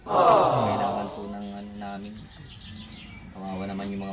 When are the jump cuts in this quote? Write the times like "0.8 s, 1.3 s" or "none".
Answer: 1.0 s